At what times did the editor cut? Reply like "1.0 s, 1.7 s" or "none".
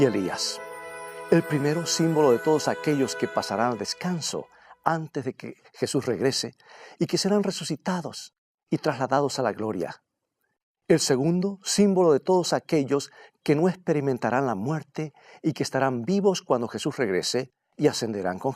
13.2 s